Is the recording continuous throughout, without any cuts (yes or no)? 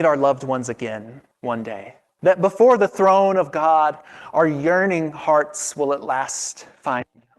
no